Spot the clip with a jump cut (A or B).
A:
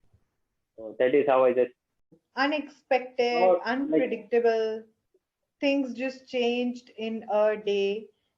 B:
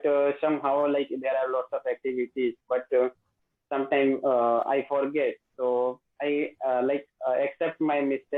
A